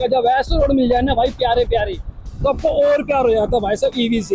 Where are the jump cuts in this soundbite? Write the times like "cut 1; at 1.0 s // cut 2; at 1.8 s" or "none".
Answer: none

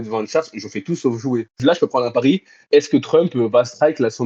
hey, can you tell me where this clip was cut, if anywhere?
cut 1; at 1.6 s

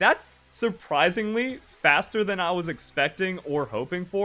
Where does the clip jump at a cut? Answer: none

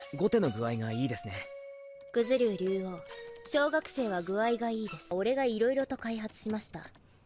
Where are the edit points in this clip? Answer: cut 1; at 1.2 s

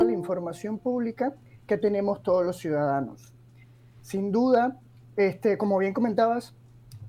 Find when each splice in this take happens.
none

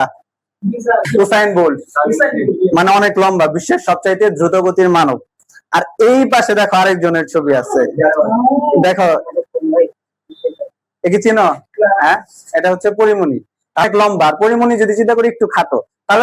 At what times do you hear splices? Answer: cut 1; at 1.1 s // cut 2; at 13.8 s

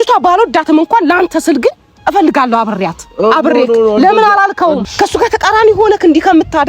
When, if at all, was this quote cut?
cut 1; at 4.8 s

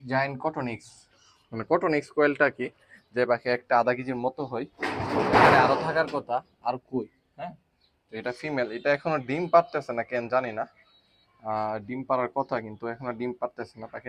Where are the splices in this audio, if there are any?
none

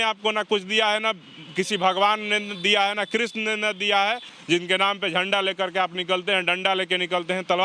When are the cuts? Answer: cut 1; at 4.3 s

